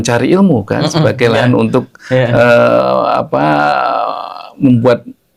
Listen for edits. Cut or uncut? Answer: uncut